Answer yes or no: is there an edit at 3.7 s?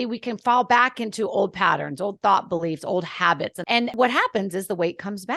yes